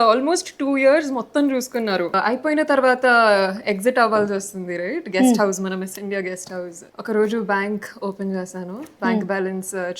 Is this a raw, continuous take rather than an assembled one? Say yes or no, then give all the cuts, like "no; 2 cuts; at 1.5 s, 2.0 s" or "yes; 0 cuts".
no; 2 cuts; at 2.1 s, 6.8 s